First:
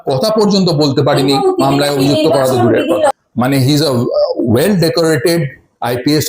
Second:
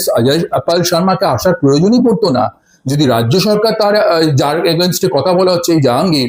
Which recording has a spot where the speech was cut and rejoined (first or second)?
first